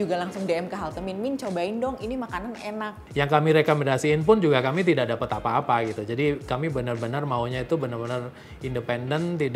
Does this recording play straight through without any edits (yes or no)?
no